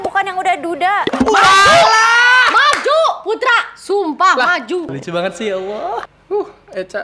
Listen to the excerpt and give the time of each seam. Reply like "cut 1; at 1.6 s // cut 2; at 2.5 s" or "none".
cut 1; at 4.9 s // cut 2; at 6.0 s